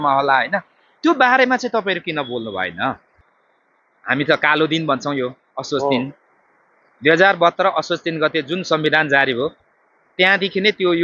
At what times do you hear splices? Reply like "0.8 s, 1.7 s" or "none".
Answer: 3.2 s